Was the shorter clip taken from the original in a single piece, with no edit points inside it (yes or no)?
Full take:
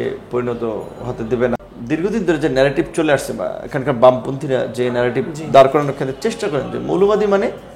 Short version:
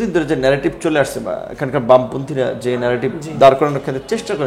yes